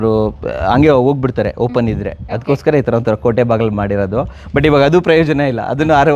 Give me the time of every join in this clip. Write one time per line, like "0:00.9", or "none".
none